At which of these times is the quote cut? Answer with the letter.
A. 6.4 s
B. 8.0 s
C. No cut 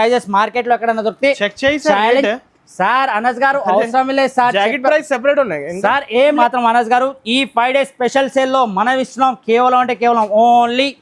A